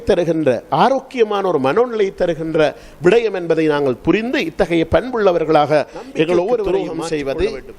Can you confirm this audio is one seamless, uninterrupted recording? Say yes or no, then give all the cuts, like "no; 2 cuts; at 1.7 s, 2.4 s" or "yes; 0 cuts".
no; 1 cut; at 6.7 s